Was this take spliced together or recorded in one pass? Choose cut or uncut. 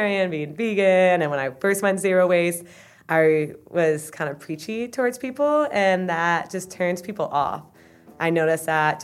uncut